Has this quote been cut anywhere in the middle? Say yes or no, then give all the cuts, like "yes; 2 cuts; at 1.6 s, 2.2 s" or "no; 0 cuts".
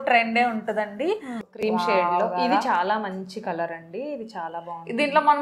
yes; 1 cut; at 1.5 s